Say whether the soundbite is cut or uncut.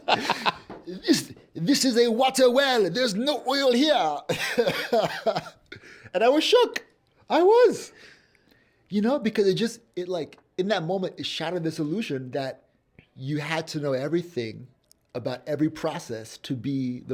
uncut